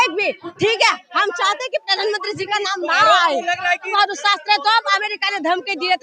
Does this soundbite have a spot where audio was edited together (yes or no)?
yes